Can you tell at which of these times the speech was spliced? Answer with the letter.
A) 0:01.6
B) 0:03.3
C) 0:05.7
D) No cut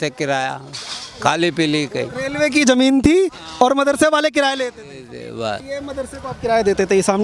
C